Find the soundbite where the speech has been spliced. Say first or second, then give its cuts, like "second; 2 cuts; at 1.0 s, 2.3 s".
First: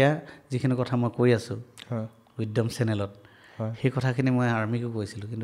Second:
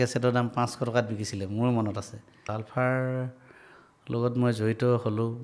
second; 1 cut; at 2.5 s